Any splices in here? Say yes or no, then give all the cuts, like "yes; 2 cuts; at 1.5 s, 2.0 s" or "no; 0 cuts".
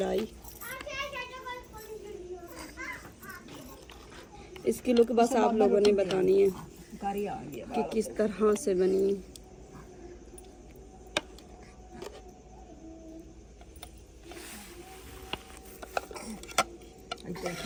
no; 0 cuts